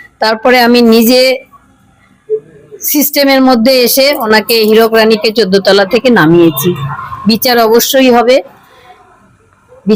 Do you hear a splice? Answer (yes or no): no